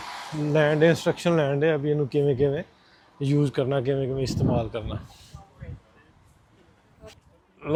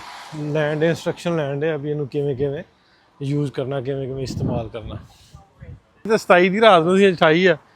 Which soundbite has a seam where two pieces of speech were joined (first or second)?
second